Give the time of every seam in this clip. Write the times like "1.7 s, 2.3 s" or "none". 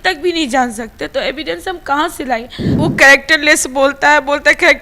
2.6 s